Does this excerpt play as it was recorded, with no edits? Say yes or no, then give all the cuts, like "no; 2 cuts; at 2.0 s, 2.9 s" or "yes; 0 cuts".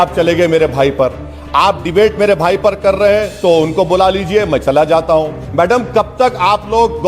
no; 1 cut; at 5.4 s